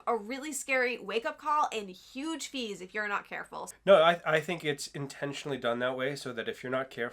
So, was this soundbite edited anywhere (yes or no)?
yes